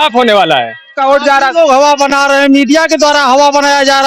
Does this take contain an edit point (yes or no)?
yes